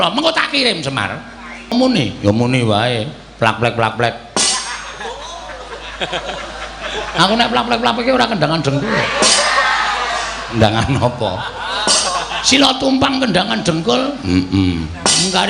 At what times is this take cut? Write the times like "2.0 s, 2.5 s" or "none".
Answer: 1.7 s